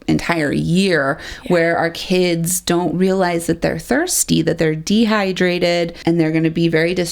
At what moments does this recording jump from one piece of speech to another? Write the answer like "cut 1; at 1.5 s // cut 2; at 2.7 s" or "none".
cut 1; at 6.0 s